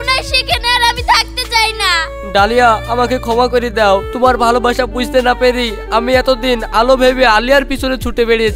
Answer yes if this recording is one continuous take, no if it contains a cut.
yes